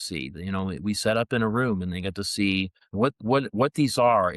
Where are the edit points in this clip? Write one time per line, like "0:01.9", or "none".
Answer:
0:02.8